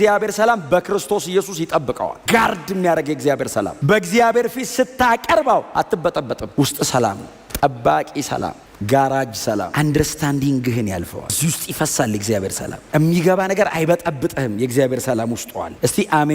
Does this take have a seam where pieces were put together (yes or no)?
no